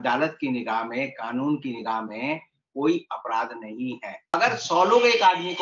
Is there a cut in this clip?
yes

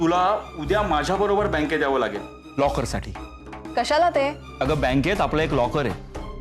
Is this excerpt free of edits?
no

